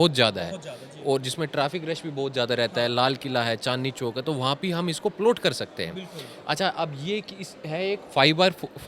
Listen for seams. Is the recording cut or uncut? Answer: uncut